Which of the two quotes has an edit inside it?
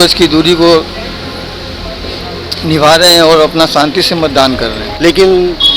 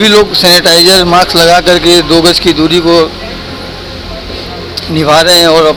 first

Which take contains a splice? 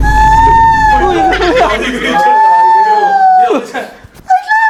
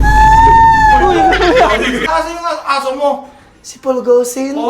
second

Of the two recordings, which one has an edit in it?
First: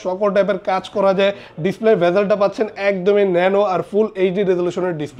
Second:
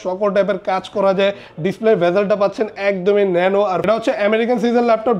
second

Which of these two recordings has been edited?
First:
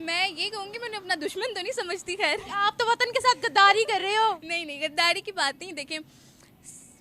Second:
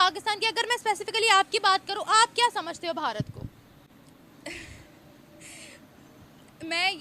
first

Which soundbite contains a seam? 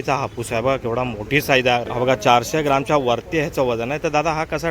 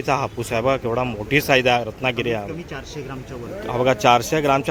first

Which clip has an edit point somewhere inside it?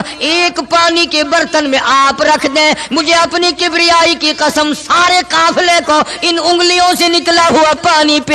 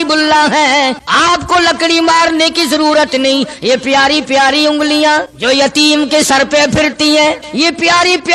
second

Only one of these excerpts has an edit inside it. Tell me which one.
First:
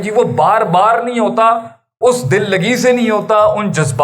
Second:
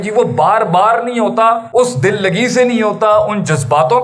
second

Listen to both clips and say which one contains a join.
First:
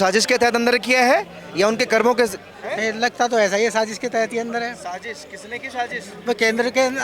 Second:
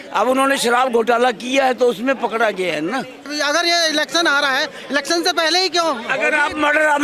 second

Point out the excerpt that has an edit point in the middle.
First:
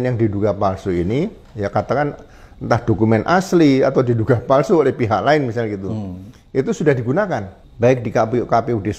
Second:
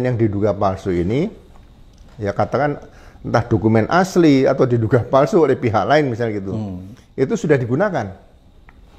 first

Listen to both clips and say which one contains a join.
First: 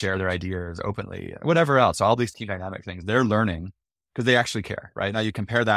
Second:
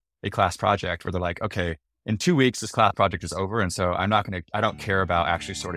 first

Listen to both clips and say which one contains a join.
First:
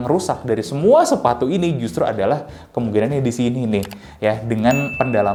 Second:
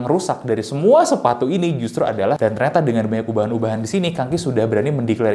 second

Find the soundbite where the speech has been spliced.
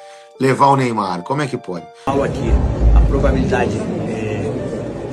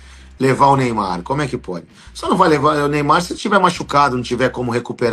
first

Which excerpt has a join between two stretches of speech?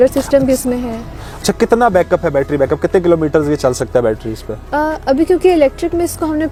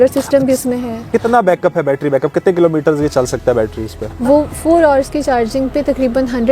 second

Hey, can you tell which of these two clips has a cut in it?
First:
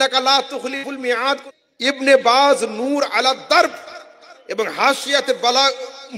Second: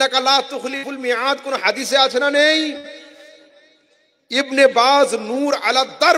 first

